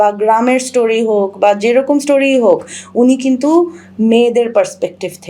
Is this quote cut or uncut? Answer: uncut